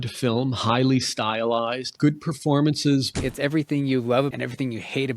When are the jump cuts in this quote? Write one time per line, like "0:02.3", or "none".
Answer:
0:01.9
0:03.1
0:04.3

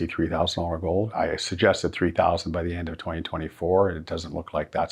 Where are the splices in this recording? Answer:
0:01.1

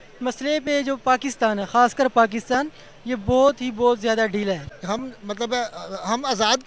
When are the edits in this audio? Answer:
0:04.7

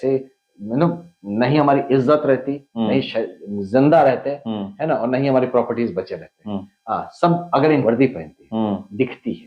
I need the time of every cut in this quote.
0:07.8

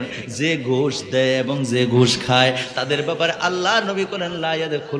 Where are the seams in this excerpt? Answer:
none

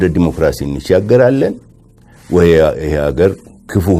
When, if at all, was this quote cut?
none

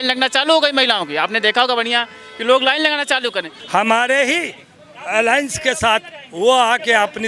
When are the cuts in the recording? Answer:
0:03.5

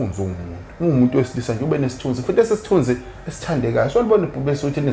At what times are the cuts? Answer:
none

